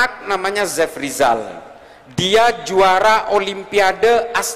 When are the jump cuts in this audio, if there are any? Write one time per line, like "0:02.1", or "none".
none